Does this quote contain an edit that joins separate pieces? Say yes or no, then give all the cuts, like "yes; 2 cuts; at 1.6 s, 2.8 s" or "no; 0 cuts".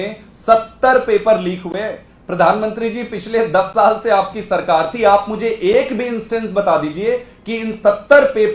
no; 0 cuts